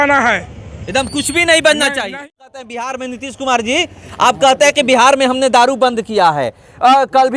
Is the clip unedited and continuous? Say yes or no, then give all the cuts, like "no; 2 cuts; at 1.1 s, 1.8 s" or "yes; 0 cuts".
no; 1 cut; at 2.0 s